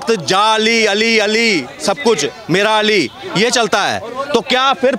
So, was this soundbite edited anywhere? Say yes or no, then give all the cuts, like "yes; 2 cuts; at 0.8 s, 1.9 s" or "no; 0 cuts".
no; 0 cuts